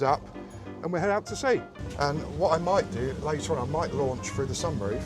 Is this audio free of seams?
no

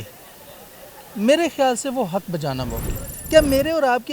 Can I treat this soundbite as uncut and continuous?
no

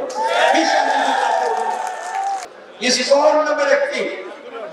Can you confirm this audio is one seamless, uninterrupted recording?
no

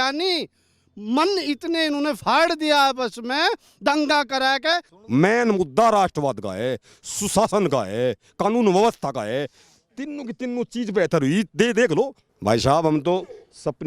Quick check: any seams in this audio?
yes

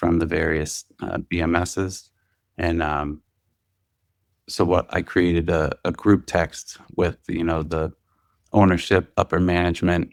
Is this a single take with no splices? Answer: yes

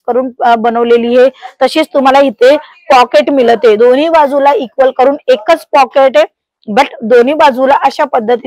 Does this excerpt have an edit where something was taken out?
no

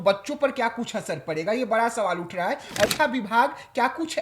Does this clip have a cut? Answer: yes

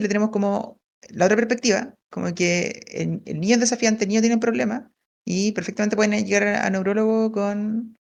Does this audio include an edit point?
no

